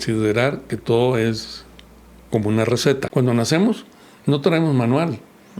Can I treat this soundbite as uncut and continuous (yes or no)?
no